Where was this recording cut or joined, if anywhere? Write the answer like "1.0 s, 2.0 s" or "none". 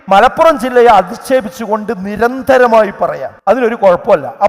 3.6 s